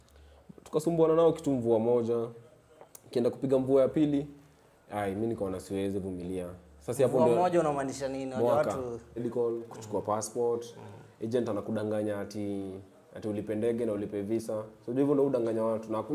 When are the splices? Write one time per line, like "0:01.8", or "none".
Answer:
0:09.2